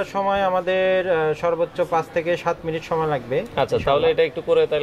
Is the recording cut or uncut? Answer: uncut